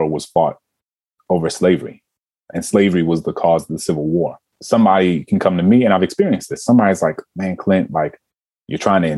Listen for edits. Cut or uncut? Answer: uncut